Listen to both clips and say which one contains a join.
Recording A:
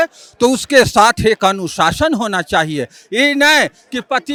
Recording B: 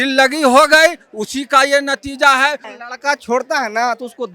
B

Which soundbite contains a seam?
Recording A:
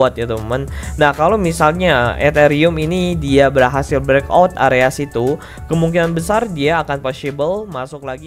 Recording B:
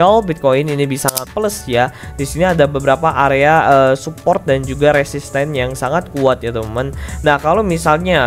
B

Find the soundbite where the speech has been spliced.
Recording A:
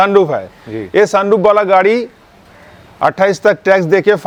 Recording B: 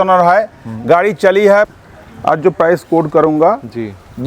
B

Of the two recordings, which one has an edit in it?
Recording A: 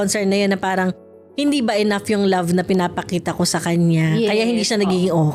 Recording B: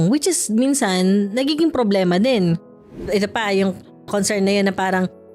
B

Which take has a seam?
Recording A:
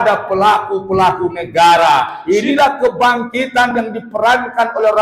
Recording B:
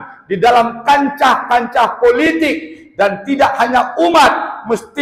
A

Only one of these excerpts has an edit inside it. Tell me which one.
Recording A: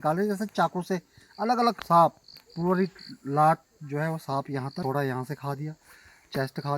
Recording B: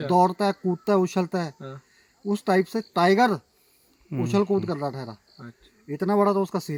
A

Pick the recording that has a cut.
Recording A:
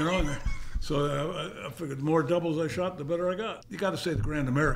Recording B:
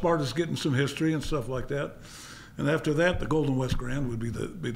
A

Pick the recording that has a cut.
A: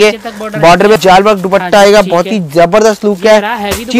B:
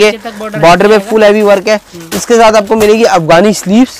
A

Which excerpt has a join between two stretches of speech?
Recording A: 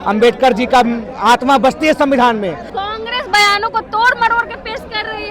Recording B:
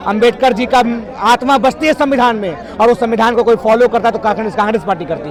A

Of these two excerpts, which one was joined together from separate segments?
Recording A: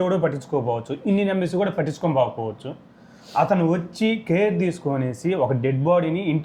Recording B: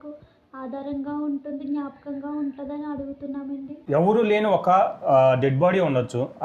B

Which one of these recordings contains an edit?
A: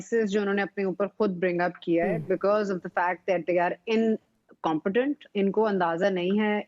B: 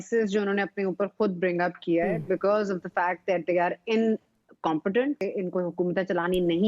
B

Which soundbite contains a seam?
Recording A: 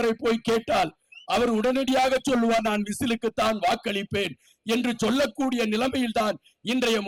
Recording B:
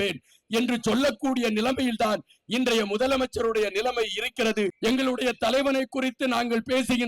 B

